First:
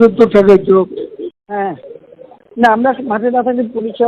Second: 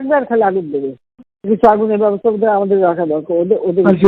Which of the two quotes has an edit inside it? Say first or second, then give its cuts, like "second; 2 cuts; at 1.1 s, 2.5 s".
first; 1 cut; at 1.4 s